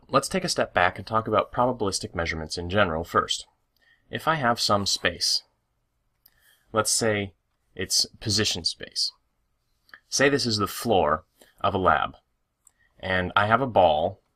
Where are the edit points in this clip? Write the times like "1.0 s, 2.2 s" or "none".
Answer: 3.0 s